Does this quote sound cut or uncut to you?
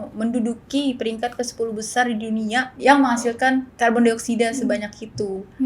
cut